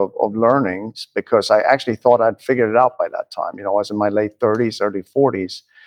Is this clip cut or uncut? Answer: uncut